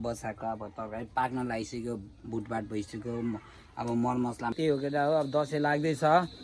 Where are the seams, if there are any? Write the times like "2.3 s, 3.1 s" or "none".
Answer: 4.5 s